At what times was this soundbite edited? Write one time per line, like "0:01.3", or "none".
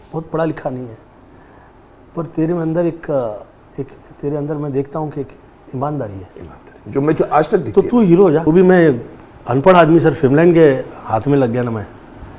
0:08.4